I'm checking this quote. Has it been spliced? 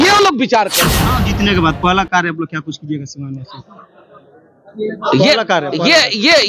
yes; 1 cut; at 1.2 s

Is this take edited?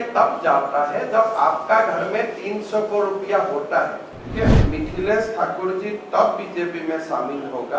yes; 1 cut; at 4.3 s

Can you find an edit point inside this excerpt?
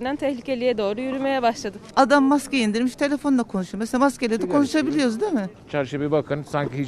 yes; 2 cuts; at 1.8 s, 5.6 s

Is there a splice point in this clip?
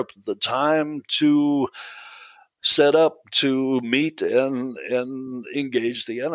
no; 0 cuts

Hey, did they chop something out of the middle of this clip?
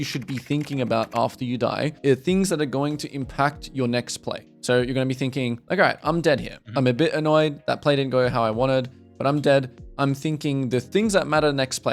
no; 0 cuts

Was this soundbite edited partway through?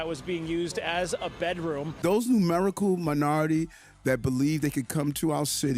yes; 1 cut; at 1.9 s

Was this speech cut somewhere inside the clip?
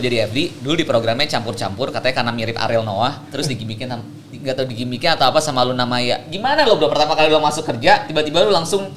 no; 0 cuts

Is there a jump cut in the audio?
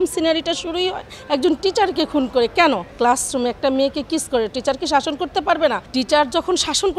yes; 2 cuts; at 2.9 s, 5.8 s

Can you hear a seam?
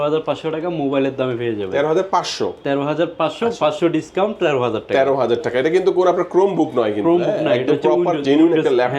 no; 0 cuts

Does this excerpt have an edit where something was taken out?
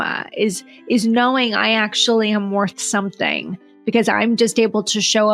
no; 0 cuts

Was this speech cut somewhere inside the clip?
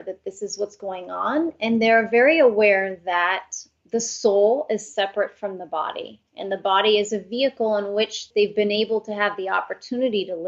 yes; 1 cut; at 8.3 s

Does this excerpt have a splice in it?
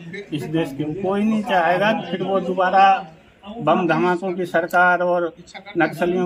no; 0 cuts

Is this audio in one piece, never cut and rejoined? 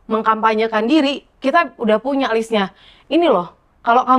yes; 0 cuts

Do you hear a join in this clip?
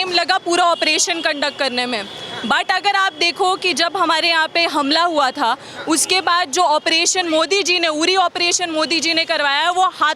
no; 0 cuts

